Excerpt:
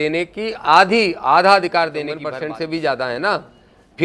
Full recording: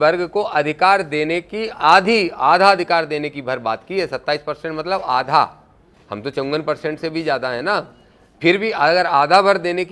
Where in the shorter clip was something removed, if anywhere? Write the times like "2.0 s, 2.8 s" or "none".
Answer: 2.2 s